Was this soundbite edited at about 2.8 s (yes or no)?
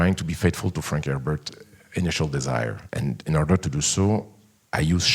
yes